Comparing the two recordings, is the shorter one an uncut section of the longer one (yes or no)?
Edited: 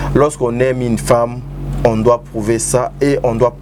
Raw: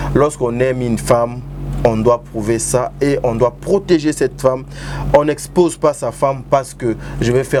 yes